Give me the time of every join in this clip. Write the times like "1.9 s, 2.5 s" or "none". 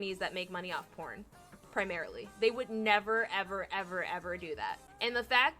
1.2 s